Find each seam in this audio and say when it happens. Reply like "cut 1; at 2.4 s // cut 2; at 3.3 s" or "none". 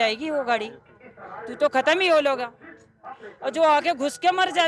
none